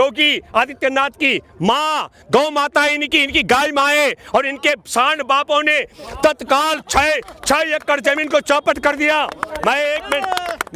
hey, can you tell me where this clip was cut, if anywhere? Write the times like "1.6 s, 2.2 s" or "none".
none